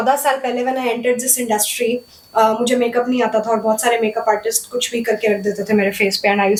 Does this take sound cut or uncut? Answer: uncut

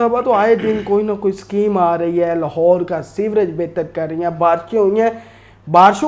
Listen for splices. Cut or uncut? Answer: uncut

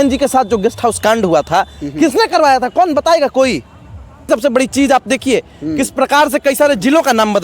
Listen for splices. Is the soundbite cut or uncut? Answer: cut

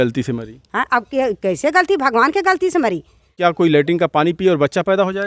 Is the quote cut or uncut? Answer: cut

